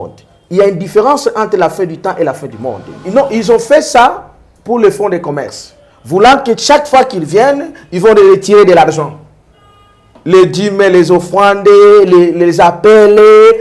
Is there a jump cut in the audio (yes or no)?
yes